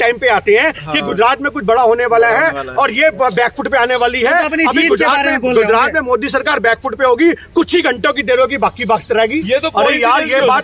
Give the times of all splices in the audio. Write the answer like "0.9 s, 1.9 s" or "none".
none